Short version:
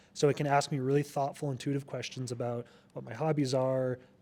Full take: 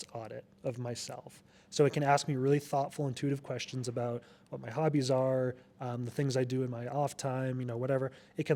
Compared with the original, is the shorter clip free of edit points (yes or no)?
yes